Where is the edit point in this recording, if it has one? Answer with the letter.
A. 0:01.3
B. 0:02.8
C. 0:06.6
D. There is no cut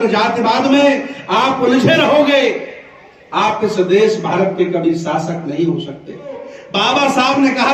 C